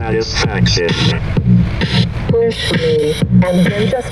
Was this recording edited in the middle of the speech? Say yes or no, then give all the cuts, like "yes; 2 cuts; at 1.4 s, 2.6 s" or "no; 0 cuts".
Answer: no; 0 cuts